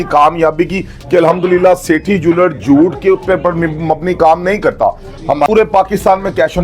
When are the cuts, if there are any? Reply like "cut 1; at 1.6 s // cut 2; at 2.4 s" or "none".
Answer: cut 1; at 5.5 s